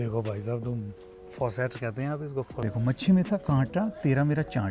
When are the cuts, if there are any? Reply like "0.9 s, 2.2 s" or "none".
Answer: 2.7 s